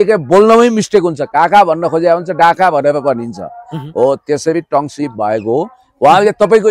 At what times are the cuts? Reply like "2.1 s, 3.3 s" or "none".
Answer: none